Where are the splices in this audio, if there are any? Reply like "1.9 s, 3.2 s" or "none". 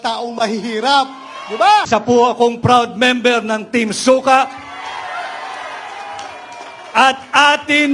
1.9 s